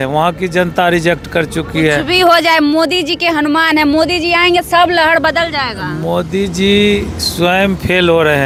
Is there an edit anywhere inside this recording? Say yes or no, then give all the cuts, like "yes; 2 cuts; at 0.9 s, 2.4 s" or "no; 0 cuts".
no; 0 cuts